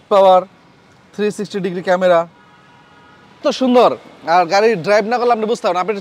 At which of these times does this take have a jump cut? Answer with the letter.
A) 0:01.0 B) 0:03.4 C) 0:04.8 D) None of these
B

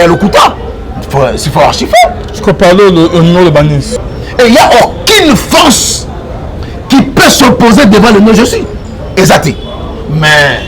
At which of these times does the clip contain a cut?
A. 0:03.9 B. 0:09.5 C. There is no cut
A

